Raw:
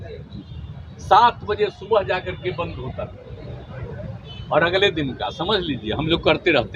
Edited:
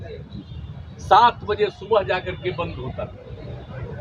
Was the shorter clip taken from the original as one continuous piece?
yes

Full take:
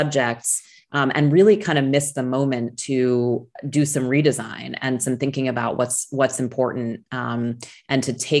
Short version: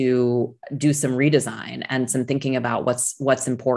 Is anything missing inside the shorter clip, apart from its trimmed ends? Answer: no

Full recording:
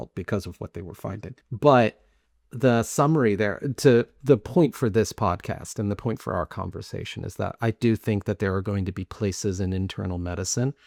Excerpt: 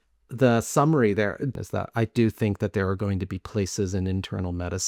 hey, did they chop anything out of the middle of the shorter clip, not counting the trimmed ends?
yes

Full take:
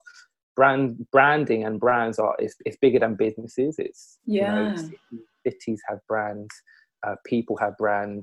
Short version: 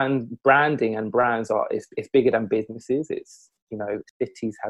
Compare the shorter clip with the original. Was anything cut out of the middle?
yes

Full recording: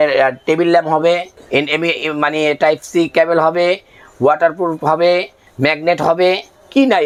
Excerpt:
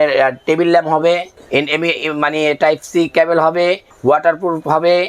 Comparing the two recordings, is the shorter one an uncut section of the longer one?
no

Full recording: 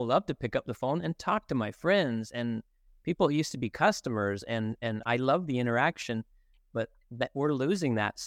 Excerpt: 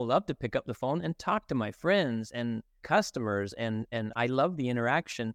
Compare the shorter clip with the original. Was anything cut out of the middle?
yes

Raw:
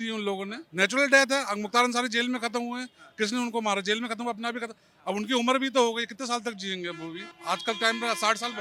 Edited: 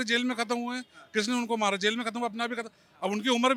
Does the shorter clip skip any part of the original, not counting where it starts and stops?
no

